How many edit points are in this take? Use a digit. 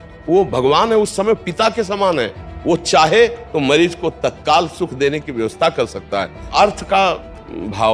1